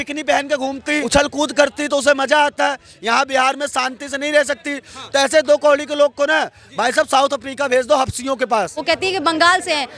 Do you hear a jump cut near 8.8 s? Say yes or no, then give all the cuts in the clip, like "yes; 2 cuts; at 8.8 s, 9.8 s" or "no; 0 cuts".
yes; 2 cuts; at 1.1 s, 8.8 s